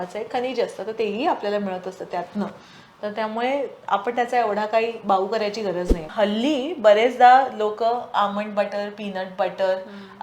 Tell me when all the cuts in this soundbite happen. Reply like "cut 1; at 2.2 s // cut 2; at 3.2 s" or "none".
cut 1; at 6.0 s

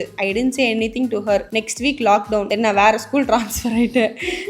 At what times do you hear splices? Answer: cut 1; at 1.5 s // cut 2; at 2.5 s

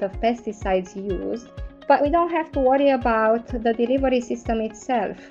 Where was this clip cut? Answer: cut 1; at 1.9 s

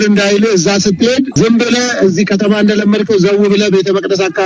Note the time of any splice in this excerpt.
cut 1; at 1.3 s

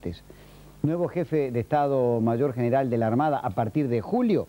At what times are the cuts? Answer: cut 1; at 2.8 s

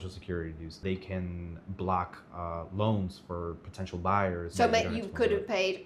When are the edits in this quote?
cut 1; at 0.8 s // cut 2; at 4.5 s

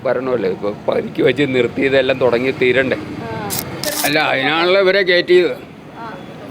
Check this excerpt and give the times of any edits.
cut 1; at 3.8 s

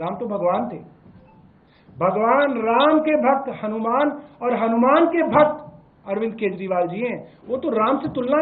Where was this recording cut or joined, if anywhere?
none

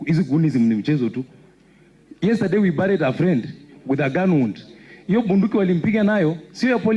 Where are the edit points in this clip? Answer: none

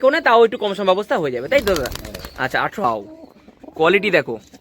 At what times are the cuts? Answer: cut 1; at 2.8 s

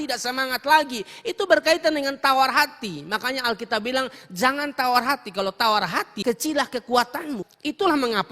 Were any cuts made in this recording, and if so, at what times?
cut 1; at 6.1 s // cut 2; at 7.5 s

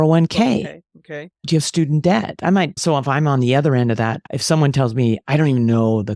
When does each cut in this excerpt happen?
cut 1; at 2.8 s // cut 2; at 4.3 s

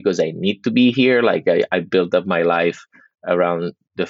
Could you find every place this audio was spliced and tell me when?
none

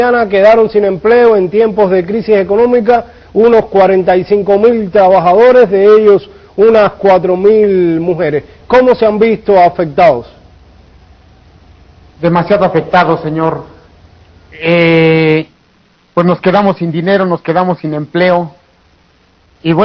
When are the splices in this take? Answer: cut 1; at 11.9 s

